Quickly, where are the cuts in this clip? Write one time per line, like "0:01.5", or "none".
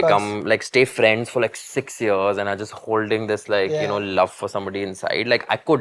none